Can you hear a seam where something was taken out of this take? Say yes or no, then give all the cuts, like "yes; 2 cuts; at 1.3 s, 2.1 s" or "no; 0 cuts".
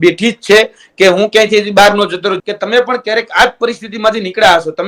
yes; 1 cut; at 2.4 s